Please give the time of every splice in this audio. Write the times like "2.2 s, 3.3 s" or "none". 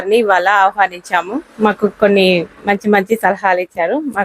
1.4 s